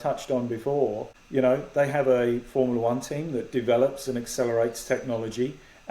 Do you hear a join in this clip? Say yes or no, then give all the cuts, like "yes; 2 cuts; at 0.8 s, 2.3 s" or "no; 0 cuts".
yes; 1 cut; at 1.1 s